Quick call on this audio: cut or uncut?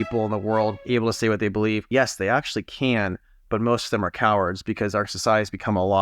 cut